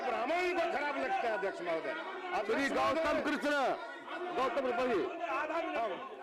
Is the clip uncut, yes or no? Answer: yes